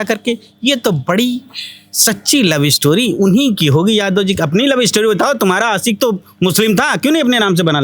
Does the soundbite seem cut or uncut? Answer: uncut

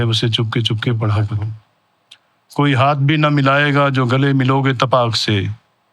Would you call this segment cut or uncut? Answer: uncut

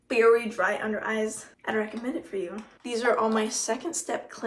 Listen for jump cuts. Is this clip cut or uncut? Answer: cut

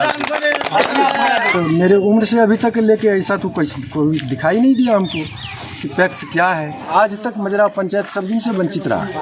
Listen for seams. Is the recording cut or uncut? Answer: cut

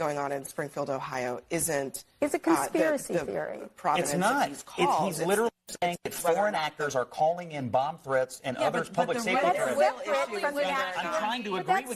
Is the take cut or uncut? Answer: uncut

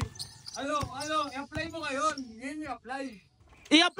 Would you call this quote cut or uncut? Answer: uncut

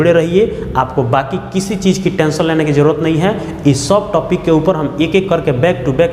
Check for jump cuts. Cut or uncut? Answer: uncut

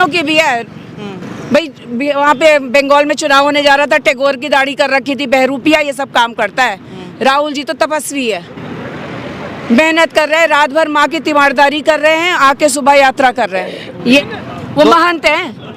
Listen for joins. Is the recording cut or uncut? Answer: cut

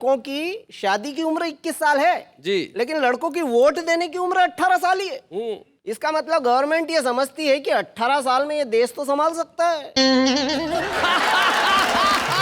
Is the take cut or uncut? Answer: uncut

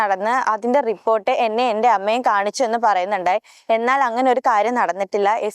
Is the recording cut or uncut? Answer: uncut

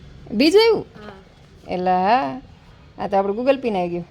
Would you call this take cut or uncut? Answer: uncut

